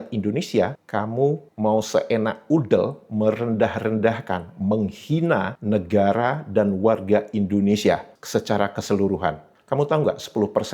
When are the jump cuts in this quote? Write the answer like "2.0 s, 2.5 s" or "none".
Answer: 9.5 s